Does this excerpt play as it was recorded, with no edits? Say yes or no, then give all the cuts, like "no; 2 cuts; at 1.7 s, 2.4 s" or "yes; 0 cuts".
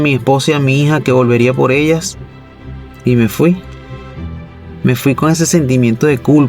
yes; 0 cuts